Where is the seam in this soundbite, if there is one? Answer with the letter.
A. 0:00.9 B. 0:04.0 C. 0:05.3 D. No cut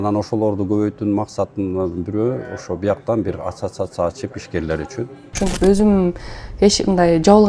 C